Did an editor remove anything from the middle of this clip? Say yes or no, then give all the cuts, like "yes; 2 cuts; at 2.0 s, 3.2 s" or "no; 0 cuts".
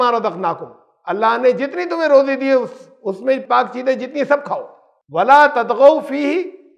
no; 0 cuts